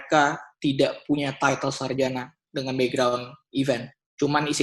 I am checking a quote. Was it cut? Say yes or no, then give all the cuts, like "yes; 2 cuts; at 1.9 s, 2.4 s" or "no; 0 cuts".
no; 0 cuts